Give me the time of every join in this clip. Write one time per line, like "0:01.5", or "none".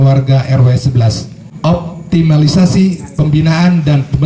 0:01.5

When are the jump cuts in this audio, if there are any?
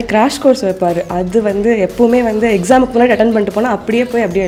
none

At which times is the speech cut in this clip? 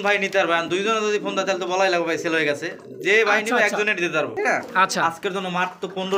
0:04.3

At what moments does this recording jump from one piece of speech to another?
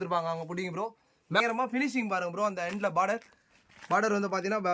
0:01.4

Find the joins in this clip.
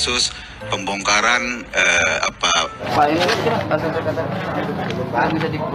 0:02.9

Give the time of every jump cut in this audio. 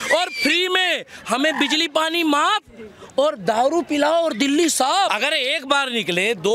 0:05.1

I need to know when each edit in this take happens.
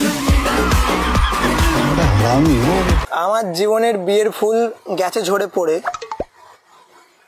0:03.0

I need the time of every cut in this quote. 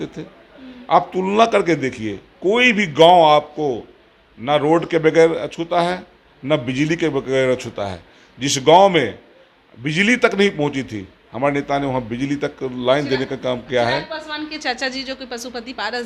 none

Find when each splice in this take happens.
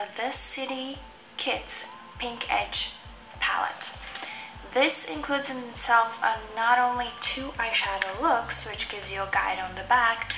none

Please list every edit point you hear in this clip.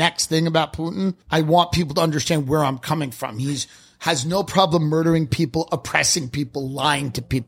0:01.2

